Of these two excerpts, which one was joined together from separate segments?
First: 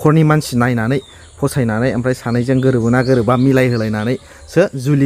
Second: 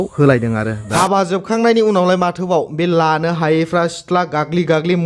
second; 1 cut; at 0.9 s

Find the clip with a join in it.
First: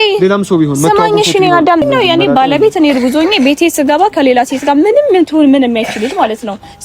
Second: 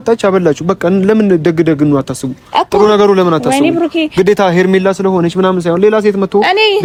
first; 1 cut; at 1.8 s

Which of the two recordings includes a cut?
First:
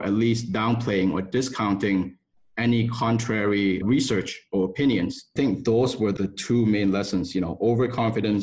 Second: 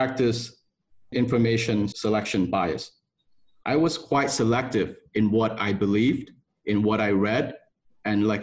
first; 3 cuts; at 3.8 s, 5.3 s, 6.1 s

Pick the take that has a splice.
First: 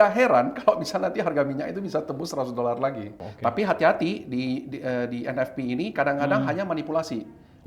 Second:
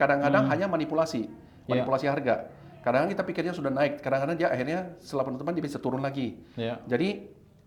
first; 1 cut; at 3.2 s

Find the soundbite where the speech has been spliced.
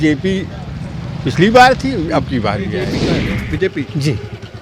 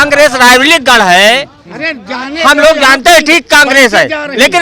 first; 1 cut; at 2.9 s

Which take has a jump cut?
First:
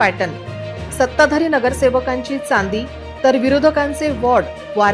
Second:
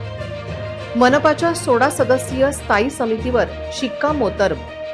second; 1 cut; at 0.9 s

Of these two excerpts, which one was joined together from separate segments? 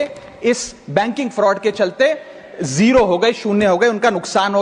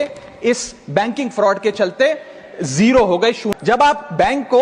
second; 1 cut; at 3.4 s

